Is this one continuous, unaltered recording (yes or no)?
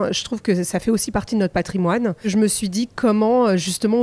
no